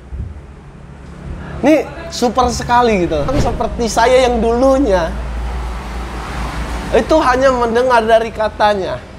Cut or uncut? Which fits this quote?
cut